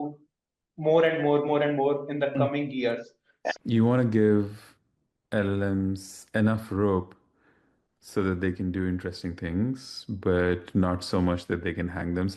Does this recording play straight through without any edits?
no; 1 cut; at 3.5 s

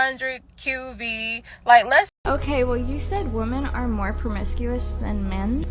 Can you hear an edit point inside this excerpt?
yes; 1 cut; at 2.1 s

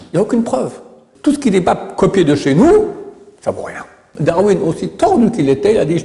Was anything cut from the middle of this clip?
yes; 2 cuts; at 1.1 s, 4.2 s

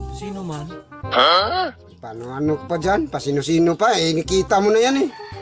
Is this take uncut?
yes; 0 cuts

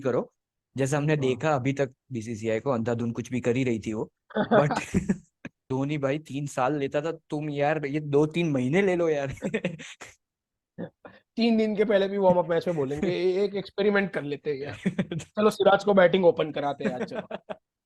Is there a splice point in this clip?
yes; 1 cut; at 5.6 s

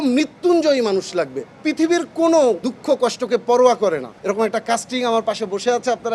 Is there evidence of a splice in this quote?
yes; 2 cuts; at 1.5 s, 4.2 s

